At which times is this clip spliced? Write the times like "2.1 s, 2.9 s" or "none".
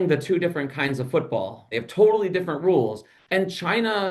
1.6 s, 3.1 s